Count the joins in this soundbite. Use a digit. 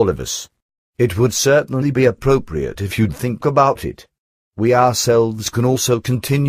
1